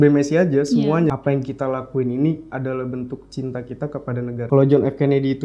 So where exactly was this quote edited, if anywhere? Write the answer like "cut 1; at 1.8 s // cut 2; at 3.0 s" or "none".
cut 1; at 1.1 s // cut 2; at 4.4 s